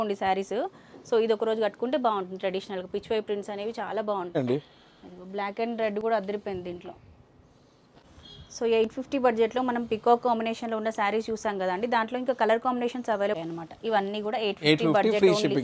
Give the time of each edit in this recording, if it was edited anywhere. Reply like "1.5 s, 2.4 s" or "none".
4.4 s, 8.1 s, 13.4 s